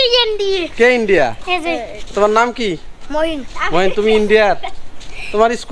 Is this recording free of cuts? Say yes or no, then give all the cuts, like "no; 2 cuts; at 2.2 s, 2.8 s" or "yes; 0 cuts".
yes; 0 cuts